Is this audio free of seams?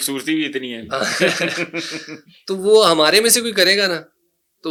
yes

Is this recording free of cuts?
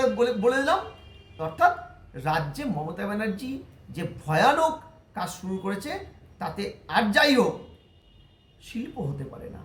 yes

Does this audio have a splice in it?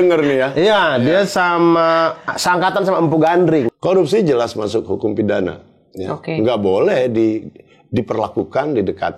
yes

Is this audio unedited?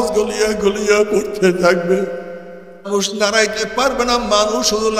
no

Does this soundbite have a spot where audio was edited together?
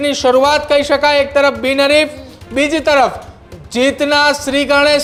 no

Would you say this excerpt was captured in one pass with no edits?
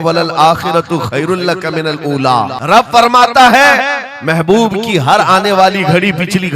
no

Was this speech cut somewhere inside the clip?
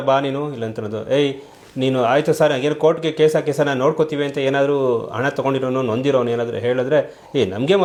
no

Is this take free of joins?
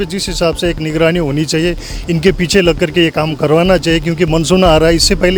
yes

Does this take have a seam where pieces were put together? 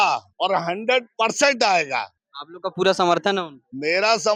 no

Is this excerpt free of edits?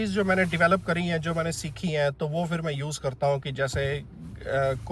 yes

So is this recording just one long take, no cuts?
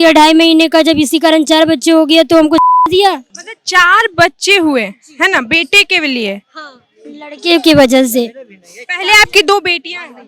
yes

